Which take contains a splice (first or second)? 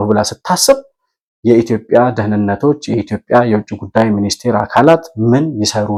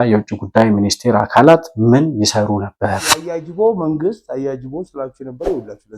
second